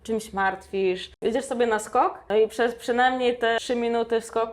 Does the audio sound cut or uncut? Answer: cut